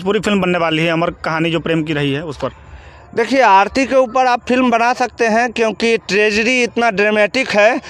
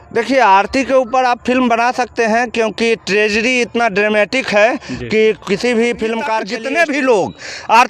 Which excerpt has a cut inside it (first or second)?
second